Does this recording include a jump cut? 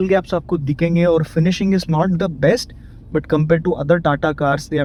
no; 0 cuts

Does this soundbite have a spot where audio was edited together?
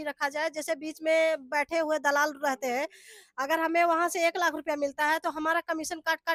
no; 0 cuts

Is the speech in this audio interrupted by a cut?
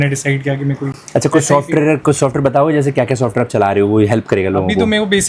no; 0 cuts

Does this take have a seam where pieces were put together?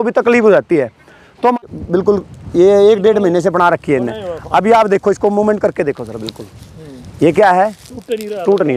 yes; 1 cut; at 1.6 s

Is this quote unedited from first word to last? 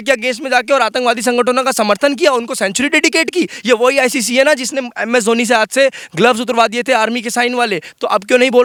yes; 0 cuts

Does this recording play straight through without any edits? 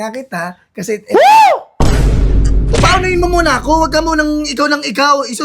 yes; 0 cuts

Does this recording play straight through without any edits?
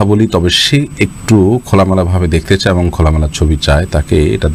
yes; 0 cuts

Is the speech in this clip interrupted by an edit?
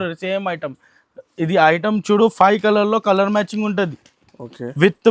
no; 0 cuts

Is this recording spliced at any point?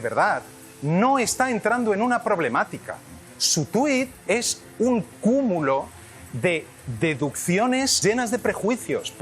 yes; 1 cut; at 8.0 s

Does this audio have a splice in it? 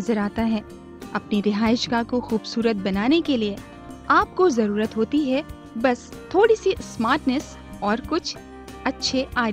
no; 0 cuts

